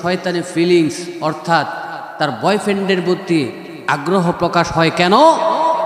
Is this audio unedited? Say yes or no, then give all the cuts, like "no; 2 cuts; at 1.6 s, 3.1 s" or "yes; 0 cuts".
yes; 0 cuts